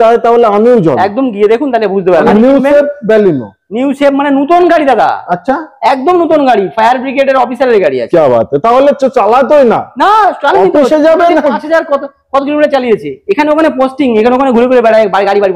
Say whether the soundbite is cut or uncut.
cut